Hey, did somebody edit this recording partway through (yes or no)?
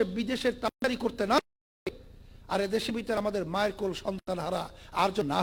no